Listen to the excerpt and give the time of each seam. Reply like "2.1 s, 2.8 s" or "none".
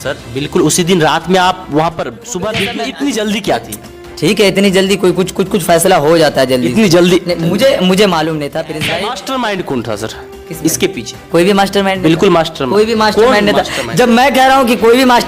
2.7 s, 8.8 s